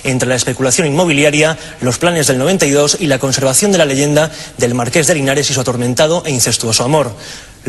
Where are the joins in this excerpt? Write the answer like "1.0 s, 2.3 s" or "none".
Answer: 3.6 s